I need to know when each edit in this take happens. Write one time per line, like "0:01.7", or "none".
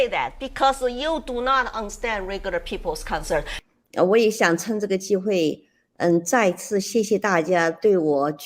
0:03.5